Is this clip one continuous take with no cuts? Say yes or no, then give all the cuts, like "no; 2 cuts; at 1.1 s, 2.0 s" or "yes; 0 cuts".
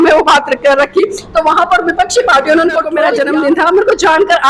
no; 1 cut; at 3.1 s